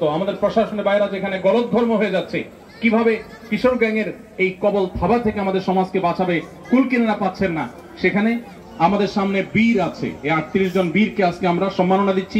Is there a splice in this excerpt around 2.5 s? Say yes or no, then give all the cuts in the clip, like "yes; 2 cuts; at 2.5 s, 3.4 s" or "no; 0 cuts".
no; 1 cut; at 8.5 s